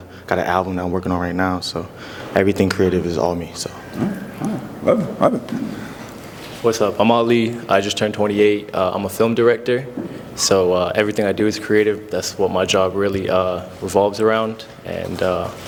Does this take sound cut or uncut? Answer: uncut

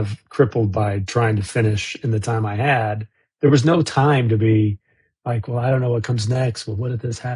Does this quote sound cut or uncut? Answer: uncut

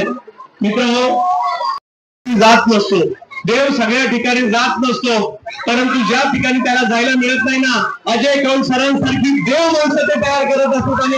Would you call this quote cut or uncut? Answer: uncut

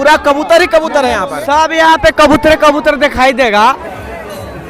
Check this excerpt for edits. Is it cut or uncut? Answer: cut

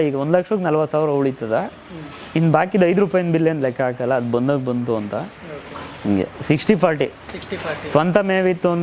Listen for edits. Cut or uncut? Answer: uncut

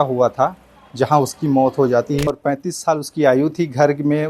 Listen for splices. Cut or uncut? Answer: cut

